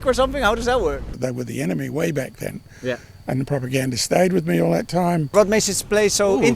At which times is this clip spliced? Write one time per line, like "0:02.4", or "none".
0:01.1
0:05.3